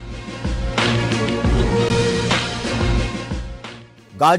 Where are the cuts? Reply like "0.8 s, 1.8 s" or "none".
none